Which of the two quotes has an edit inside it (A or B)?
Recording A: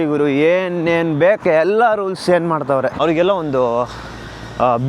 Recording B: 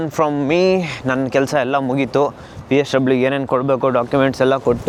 A